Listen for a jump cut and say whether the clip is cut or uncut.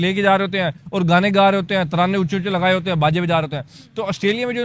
uncut